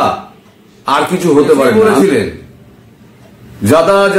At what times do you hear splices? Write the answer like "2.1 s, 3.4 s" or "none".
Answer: 1.7 s